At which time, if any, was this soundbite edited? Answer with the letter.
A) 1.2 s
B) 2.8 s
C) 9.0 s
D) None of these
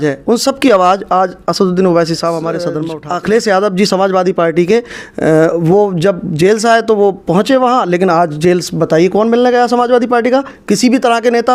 B